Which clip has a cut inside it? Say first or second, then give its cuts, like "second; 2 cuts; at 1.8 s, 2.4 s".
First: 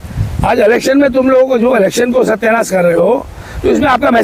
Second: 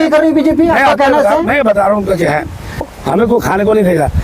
second; 1 cut; at 2.9 s